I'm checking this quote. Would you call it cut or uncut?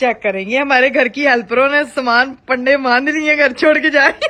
uncut